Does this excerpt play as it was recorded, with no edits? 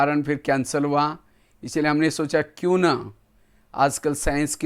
yes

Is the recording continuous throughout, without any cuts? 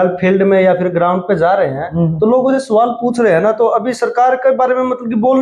yes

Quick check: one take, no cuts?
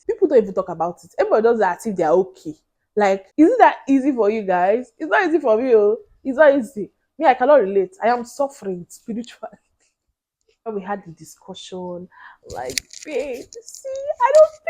no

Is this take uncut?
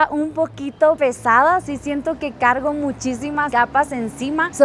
no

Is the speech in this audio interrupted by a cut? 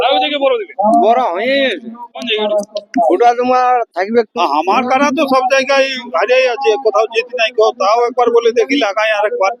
yes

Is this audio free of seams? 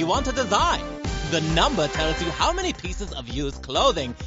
yes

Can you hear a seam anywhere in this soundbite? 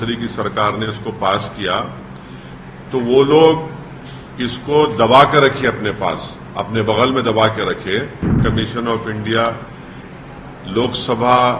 yes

